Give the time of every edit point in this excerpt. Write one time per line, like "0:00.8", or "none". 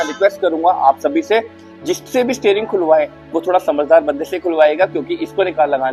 none